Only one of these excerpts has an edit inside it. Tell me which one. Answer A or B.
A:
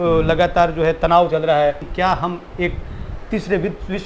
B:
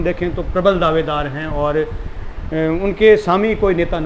A